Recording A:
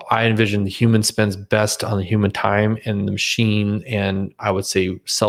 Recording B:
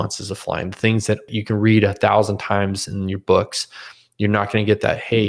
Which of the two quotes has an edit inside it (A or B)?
B